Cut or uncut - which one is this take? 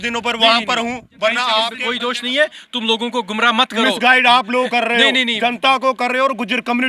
cut